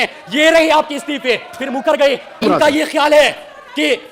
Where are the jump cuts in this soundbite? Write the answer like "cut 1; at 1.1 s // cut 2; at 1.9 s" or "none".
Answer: cut 1; at 2.4 s